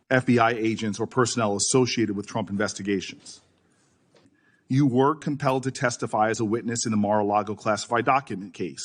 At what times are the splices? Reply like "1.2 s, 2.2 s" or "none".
4.1 s